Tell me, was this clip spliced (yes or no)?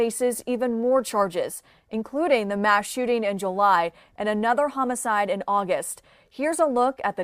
no